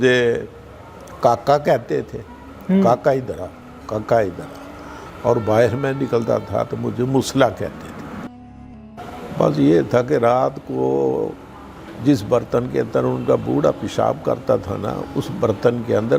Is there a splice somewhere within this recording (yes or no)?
yes